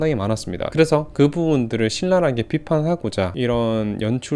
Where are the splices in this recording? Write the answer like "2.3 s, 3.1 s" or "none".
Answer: 3.3 s